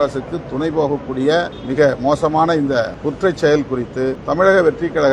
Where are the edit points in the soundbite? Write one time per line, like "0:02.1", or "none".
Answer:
0:01.6
0:02.9
0:04.2